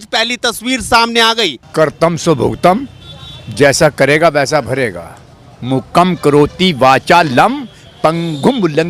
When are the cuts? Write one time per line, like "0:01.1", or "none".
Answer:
0:01.6